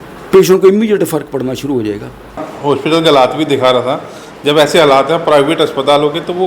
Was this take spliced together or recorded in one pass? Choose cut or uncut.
cut